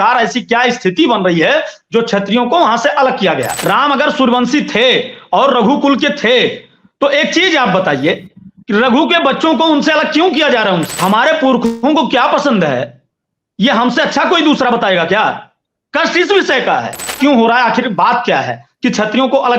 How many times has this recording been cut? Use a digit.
3